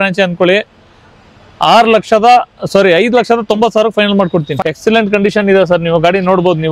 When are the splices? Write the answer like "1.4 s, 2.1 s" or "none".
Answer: 4.5 s